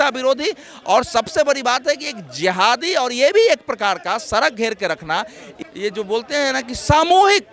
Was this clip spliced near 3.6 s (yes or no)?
no